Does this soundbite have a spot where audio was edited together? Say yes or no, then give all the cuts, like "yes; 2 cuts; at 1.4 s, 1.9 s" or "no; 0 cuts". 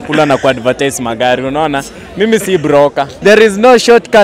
yes; 1 cut; at 3.1 s